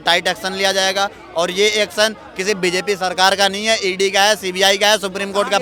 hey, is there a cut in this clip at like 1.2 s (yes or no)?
no